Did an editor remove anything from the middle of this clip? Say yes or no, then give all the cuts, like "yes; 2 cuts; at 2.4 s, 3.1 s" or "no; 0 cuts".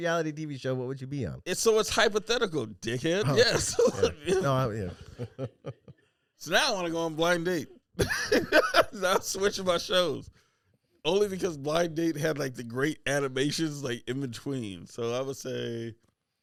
no; 0 cuts